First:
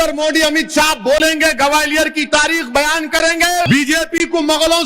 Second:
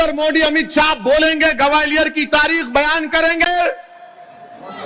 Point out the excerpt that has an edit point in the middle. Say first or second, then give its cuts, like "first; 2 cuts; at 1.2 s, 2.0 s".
first; 1 cut; at 3.7 s